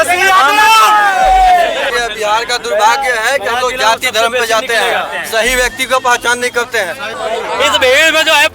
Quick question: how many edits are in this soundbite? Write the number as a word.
two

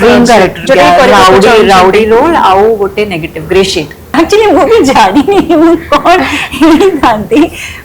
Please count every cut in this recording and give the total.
one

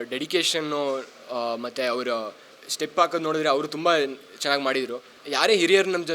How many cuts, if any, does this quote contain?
one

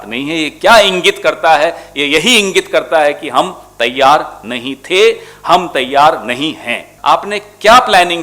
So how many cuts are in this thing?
one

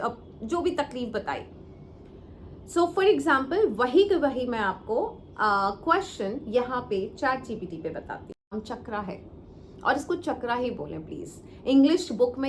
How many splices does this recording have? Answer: one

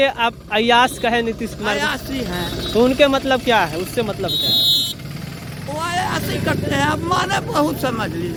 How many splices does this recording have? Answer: zero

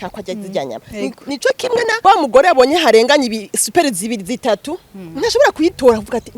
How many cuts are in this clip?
one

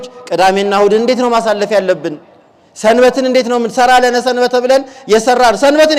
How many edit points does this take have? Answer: zero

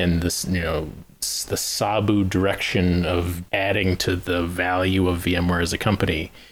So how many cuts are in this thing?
one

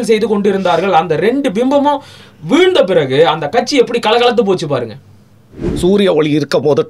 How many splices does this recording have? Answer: one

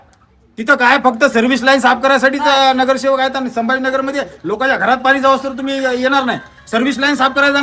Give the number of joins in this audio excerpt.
zero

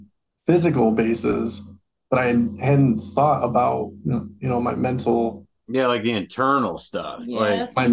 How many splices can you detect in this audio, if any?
zero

